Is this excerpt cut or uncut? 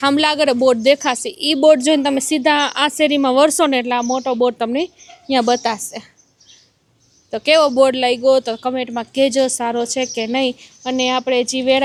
uncut